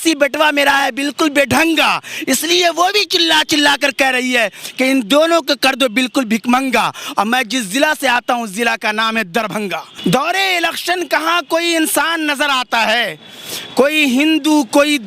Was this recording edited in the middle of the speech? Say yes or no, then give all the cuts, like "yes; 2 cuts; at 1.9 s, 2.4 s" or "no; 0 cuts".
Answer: yes; 1 cut; at 9.9 s